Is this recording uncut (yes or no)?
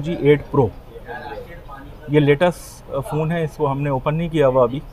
yes